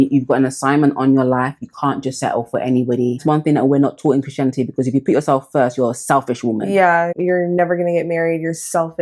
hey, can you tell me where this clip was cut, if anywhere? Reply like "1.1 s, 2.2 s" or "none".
3.2 s, 7.1 s